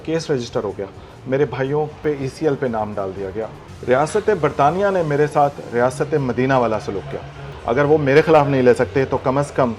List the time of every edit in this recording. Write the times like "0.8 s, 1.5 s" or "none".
1.1 s, 2.0 s, 3.6 s, 7.5 s